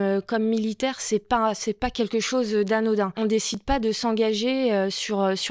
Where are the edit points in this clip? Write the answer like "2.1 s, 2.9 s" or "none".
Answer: 3.1 s